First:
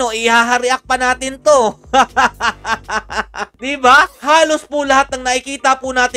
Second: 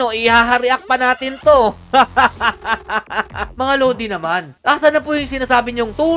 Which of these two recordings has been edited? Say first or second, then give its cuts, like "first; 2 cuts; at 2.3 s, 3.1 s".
second; 1 cut; at 3.5 s